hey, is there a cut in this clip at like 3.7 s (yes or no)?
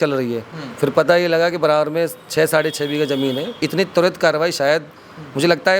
yes